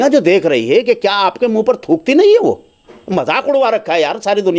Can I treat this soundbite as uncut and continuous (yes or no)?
yes